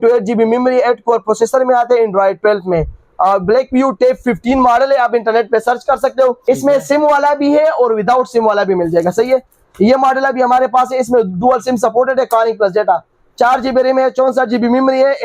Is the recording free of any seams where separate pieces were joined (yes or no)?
no